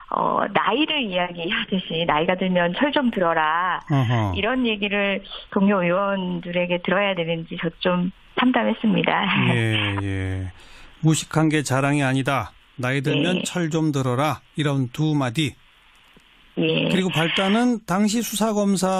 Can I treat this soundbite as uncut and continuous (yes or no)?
no